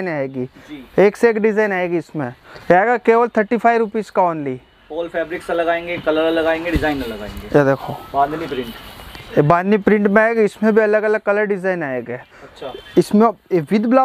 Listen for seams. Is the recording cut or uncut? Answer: uncut